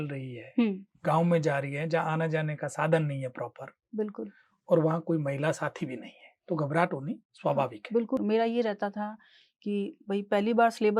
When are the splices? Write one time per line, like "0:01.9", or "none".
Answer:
0:08.2